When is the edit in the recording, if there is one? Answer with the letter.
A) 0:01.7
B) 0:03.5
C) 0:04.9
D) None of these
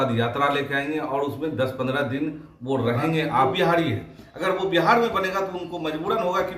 B